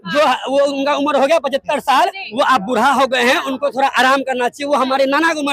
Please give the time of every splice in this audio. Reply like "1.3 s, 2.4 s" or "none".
none